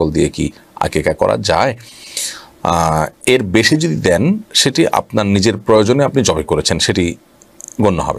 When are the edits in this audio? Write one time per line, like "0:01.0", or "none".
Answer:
none